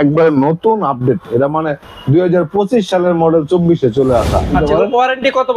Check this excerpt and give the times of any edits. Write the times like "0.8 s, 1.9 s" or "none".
4.5 s

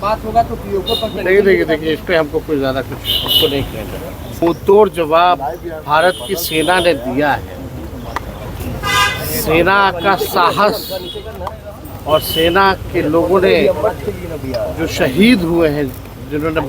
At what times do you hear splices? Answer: 1.2 s, 4.4 s

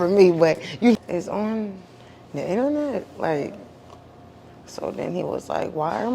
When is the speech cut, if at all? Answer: 1.0 s

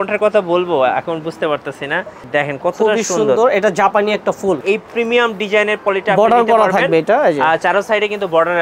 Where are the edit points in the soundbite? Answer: 2.2 s, 4.6 s

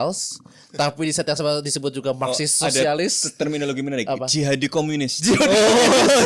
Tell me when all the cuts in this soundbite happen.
none

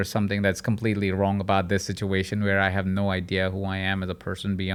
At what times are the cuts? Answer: none

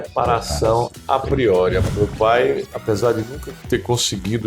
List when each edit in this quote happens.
1.9 s

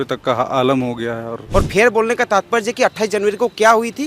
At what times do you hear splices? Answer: 1.4 s

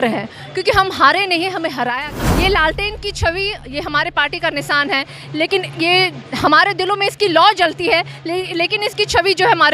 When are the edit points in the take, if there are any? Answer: 1.9 s

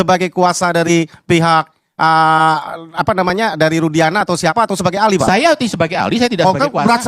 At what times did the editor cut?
none

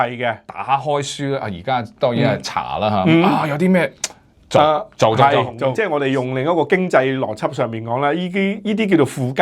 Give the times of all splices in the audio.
5.8 s

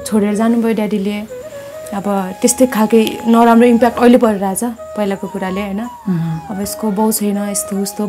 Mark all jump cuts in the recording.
none

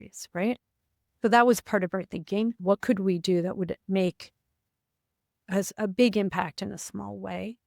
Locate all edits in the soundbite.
2.6 s

